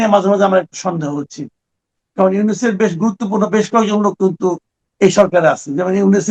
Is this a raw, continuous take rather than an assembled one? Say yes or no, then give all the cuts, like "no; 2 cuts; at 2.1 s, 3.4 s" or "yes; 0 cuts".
yes; 0 cuts